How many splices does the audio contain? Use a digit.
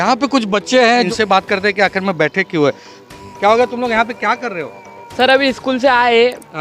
1